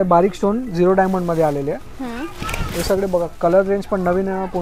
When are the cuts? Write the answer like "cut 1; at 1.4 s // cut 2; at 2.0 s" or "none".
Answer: none